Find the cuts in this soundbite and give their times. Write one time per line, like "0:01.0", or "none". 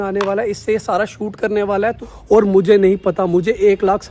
0:02.1